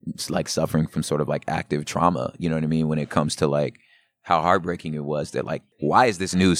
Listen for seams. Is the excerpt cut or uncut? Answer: cut